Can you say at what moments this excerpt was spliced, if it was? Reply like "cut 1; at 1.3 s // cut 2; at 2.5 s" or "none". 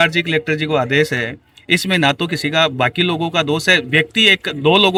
none